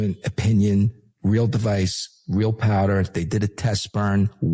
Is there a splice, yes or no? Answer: no